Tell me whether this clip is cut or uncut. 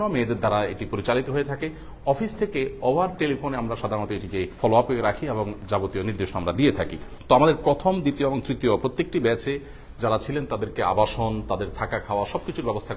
uncut